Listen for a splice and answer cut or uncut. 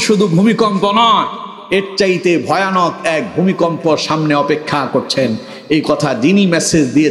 uncut